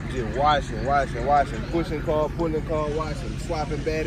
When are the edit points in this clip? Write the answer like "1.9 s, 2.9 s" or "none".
none